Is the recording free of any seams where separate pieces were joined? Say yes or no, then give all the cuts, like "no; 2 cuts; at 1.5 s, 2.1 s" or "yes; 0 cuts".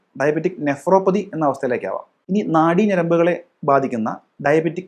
no; 1 cut; at 2.1 s